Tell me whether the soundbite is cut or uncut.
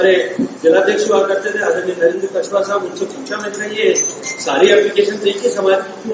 uncut